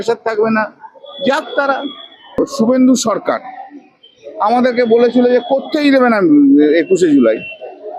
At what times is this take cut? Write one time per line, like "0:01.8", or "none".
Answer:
0:02.4